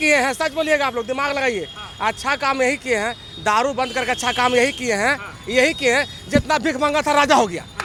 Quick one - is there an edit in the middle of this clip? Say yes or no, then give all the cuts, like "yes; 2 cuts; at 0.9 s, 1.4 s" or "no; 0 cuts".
no; 0 cuts